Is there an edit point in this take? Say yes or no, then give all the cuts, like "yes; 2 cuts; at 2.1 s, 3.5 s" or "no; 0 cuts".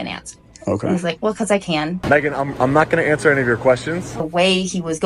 yes; 2 cuts; at 2.0 s, 4.2 s